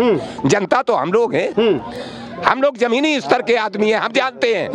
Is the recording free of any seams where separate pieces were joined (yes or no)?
yes